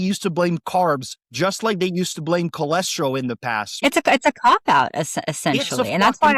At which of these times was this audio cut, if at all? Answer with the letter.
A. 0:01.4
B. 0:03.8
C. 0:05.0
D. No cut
B